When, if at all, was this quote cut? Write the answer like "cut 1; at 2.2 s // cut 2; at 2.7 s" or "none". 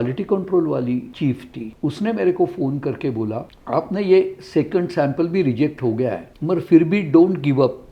cut 1; at 1.3 s // cut 2; at 3.5 s // cut 3; at 6.3 s